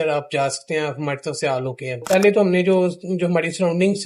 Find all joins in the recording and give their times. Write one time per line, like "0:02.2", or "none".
0:01.9